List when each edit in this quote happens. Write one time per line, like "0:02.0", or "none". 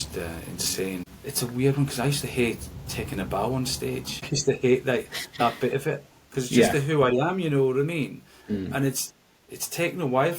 0:01.1
0:04.3